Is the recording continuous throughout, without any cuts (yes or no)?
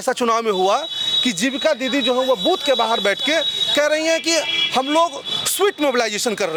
yes